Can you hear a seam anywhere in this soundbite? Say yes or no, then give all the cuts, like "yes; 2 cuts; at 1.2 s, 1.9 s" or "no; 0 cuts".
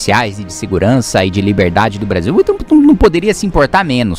no; 0 cuts